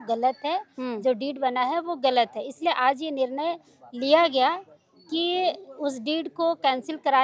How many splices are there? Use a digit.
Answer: 0